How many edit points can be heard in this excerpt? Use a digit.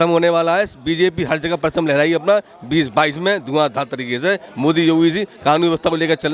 0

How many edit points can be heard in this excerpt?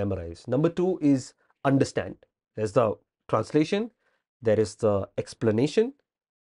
1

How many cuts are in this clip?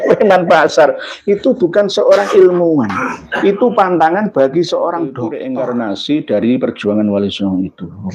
1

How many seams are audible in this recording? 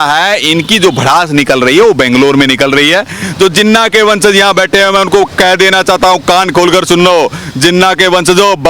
1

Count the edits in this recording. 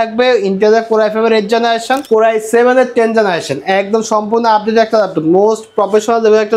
1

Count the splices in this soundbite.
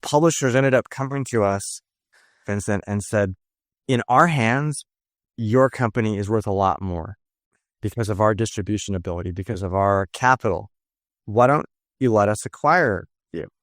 0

